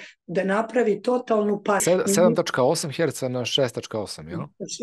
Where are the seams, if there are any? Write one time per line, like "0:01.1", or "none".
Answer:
0:01.8